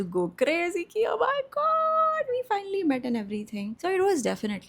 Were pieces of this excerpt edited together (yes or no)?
no